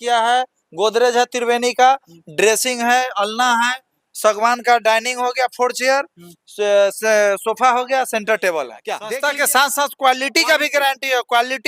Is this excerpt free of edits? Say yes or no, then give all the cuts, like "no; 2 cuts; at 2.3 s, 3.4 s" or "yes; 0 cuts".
no; 1 cut; at 8.9 s